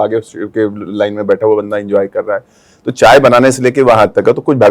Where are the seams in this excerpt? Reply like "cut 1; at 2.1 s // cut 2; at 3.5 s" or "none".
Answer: none

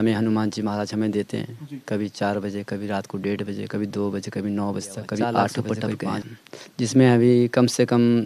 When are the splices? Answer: cut 1; at 6.3 s

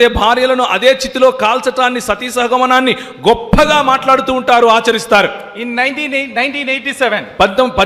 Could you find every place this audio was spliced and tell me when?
none

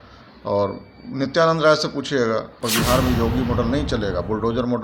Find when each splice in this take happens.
cut 1; at 2.6 s

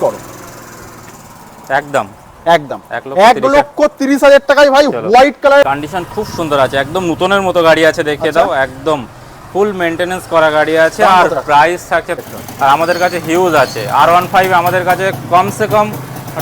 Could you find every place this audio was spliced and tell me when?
cut 1; at 5.6 s // cut 2; at 12.2 s

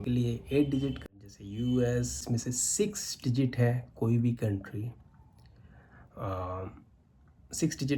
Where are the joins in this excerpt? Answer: cut 1; at 1.0 s // cut 2; at 2.2 s

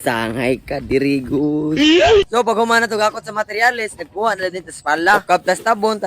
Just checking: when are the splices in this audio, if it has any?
cut 1; at 2.2 s

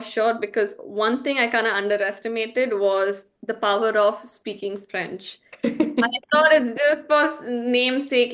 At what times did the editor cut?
none

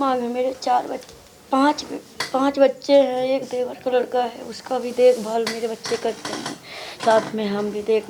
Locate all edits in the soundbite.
none

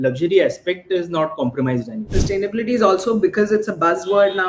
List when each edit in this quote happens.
cut 1; at 2.1 s

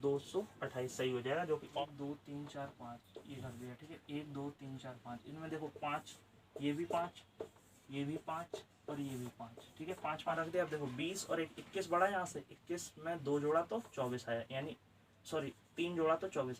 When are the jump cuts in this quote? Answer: cut 1; at 1.8 s // cut 2; at 10.4 s

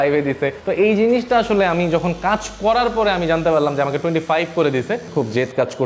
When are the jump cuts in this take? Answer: none

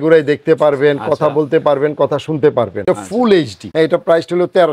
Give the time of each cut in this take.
cut 1; at 2.8 s // cut 2; at 3.6 s

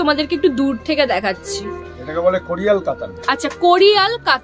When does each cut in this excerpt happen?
none

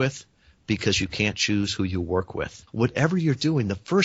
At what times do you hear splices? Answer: cut 1; at 2.6 s

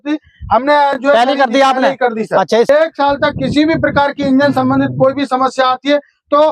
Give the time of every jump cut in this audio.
cut 1; at 2.7 s

